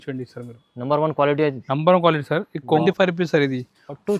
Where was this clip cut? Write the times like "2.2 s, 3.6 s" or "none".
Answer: 2.8 s